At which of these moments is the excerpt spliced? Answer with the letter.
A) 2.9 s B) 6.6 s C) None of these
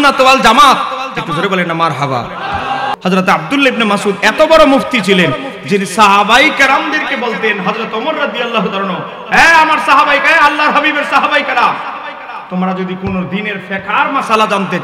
A